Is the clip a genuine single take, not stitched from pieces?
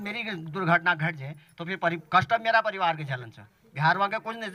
yes; 0 cuts

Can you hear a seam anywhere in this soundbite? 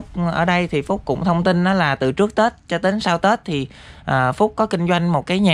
no; 0 cuts

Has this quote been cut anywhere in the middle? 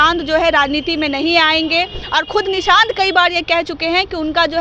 no; 0 cuts

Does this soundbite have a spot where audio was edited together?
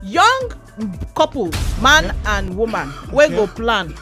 yes; 1 cut; at 1.7 s

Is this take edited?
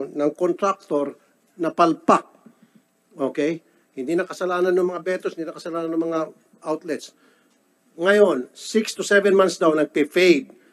no; 0 cuts

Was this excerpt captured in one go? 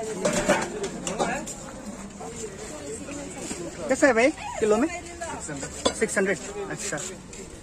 no; 1 cut; at 2.2 s

